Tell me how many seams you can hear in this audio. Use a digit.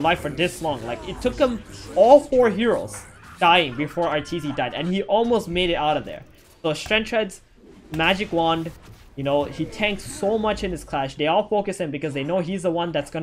0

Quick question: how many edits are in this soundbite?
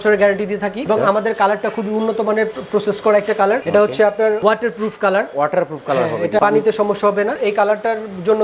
0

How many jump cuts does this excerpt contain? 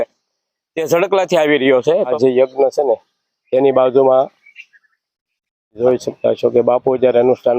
2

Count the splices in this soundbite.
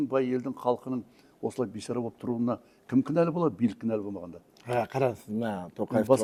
0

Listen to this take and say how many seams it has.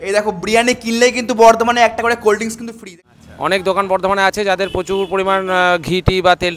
1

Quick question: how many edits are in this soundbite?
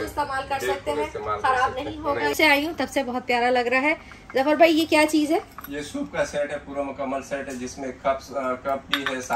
1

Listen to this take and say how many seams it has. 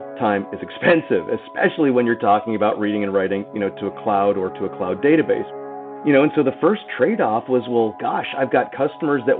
1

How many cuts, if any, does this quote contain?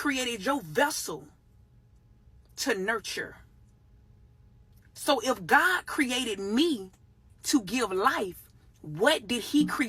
1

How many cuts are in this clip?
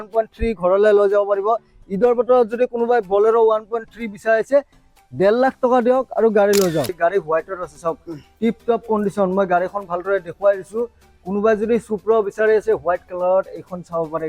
1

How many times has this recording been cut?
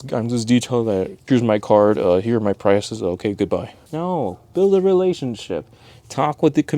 2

